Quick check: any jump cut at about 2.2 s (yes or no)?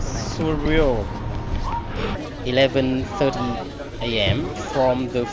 yes